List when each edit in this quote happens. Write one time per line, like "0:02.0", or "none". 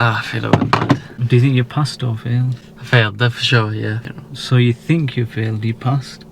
0:01.1
0:04.0